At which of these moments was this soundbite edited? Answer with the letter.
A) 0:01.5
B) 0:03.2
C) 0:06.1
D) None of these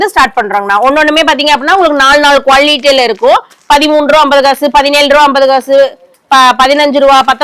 D